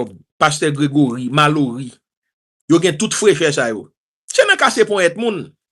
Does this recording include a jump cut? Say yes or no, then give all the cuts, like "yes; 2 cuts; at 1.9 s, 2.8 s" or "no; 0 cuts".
no; 0 cuts